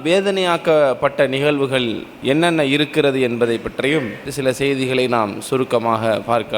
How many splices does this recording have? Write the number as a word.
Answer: one